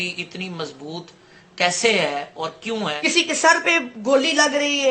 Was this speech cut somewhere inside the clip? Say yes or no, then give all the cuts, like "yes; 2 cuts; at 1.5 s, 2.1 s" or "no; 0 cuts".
yes; 1 cut; at 3.0 s